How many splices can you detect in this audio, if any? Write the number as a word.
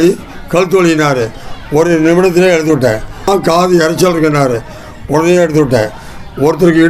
one